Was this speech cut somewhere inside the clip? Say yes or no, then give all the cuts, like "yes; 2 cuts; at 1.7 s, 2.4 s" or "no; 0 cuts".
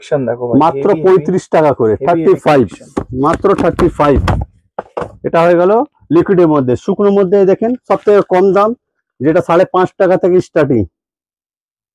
no; 0 cuts